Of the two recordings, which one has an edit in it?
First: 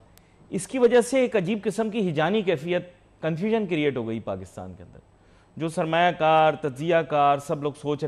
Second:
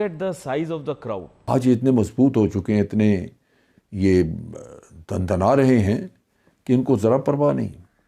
second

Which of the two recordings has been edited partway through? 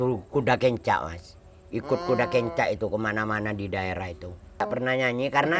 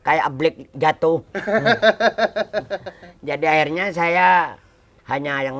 first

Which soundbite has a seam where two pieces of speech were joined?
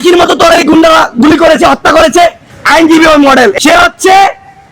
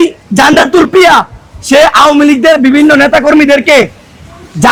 first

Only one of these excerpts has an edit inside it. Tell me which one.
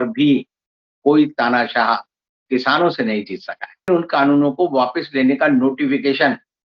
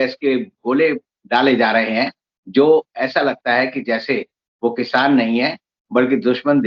first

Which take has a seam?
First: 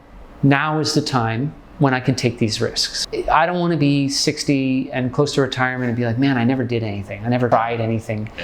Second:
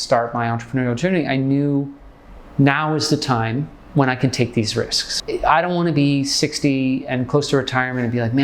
first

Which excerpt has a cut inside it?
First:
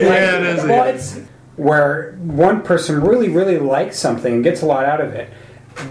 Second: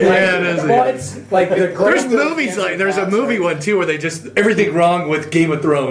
first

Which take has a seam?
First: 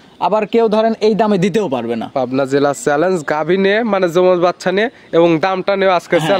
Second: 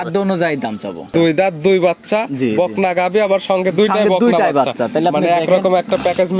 second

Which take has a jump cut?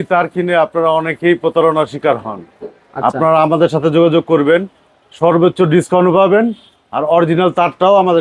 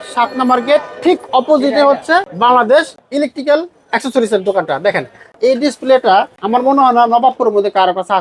second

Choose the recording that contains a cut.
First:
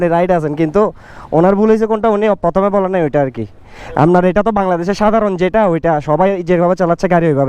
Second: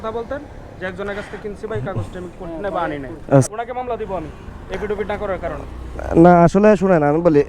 second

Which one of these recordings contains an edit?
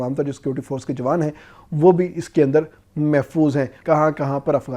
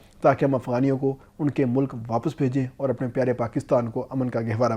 first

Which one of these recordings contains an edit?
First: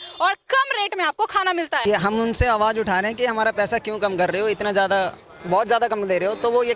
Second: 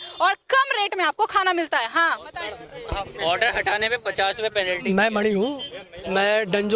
first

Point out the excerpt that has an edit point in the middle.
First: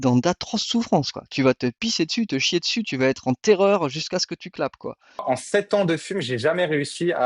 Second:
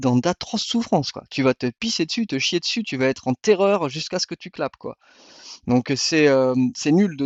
first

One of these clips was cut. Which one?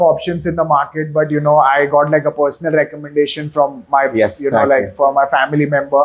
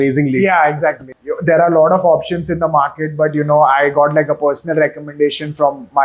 second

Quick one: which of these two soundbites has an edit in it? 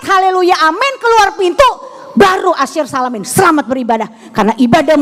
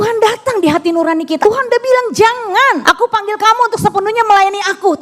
second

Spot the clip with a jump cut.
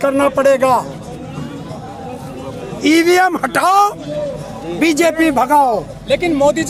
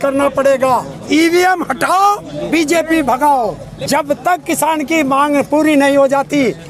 second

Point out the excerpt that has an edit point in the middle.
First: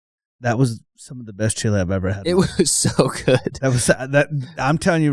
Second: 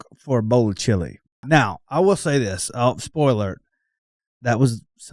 second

